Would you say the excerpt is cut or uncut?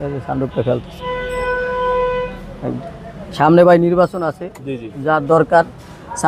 uncut